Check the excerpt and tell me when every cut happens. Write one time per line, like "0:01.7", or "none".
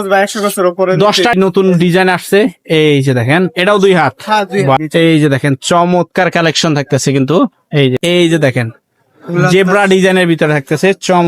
0:01.3
0:04.8
0:08.0